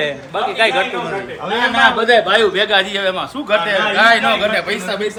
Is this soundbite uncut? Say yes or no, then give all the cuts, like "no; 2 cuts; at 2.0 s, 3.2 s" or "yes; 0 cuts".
yes; 0 cuts